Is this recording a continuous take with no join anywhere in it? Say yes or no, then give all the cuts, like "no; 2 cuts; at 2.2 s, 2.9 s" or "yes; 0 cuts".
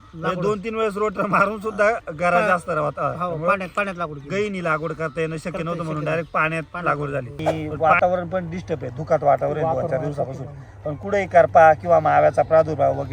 no; 1 cut; at 7.4 s